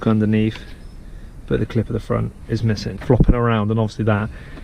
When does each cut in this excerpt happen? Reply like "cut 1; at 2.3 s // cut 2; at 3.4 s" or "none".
cut 1; at 2.9 s